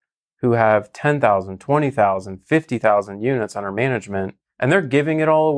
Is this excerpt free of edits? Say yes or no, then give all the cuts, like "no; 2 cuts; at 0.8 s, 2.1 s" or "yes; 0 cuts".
no; 1 cut; at 4.4 s